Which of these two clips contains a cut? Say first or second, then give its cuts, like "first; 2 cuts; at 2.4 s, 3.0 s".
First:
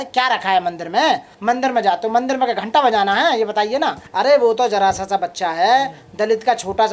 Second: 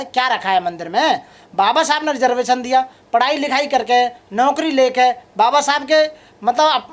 first; 2 cuts; at 1.3 s, 4.0 s